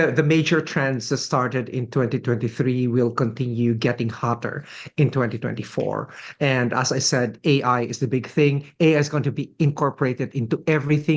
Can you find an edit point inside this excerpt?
no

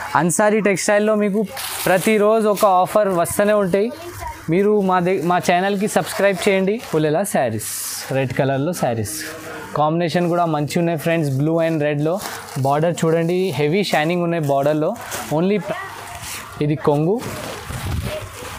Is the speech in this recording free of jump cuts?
no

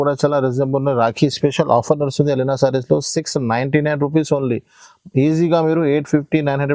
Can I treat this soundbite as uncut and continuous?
yes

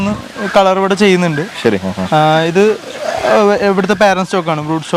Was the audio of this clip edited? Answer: no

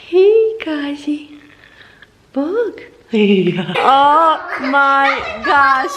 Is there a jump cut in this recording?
yes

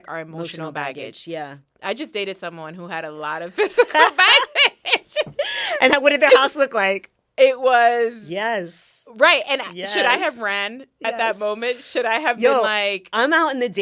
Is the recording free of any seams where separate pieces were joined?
yes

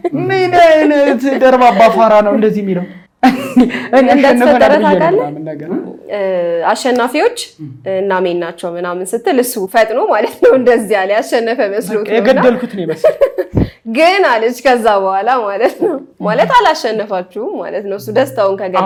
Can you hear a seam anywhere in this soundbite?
no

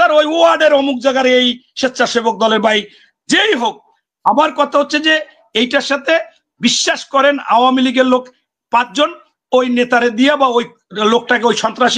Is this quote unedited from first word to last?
yes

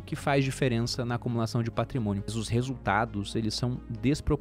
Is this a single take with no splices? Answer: no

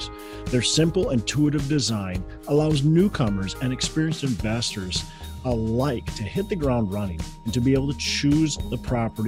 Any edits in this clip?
no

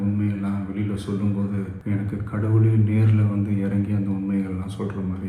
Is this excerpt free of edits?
no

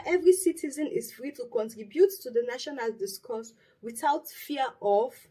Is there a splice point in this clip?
no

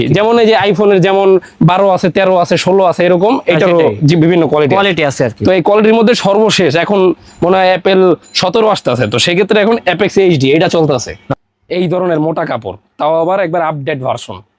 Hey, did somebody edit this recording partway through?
yes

